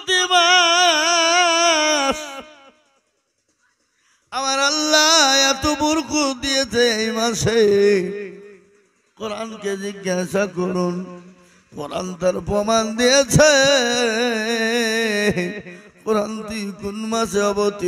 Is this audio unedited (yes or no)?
yes